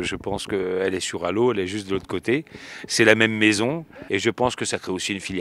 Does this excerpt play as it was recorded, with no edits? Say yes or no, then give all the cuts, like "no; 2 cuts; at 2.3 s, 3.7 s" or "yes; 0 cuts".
no; 1 cut; at 3.9 s